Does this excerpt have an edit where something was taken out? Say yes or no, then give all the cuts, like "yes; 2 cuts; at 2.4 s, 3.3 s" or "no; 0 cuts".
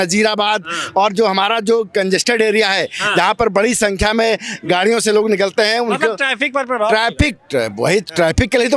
no; 0 cuts